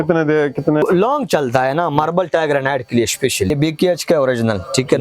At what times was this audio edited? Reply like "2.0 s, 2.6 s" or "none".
0.8 s, 3.5 s